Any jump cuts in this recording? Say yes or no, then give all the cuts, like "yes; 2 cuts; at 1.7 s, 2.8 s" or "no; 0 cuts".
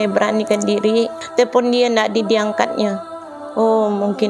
yes; 1 cut; at 1.2 s